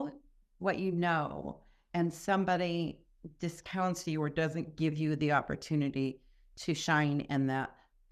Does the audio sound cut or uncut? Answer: uncut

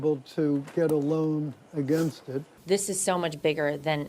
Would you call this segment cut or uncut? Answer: cut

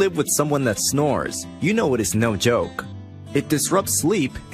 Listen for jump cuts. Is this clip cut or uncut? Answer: uncut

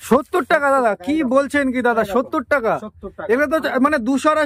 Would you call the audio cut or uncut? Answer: uncut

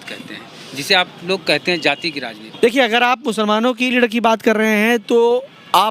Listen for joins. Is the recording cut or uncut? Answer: cut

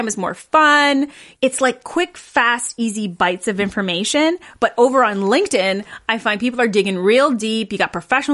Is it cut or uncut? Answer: cut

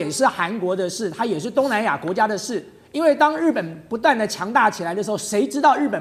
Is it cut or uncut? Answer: uncut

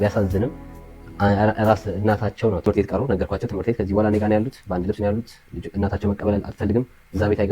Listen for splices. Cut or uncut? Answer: cut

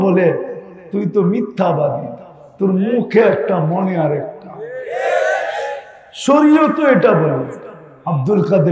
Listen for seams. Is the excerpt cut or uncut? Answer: uncut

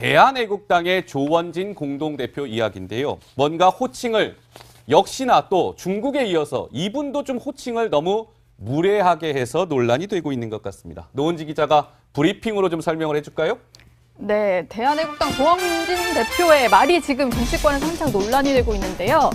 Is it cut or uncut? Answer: uncut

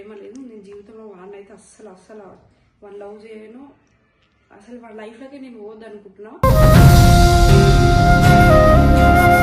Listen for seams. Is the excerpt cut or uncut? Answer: uncut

